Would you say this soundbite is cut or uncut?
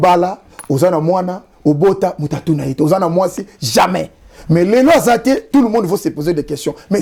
uncut